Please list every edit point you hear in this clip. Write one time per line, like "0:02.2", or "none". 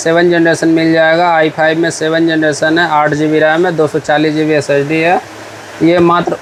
none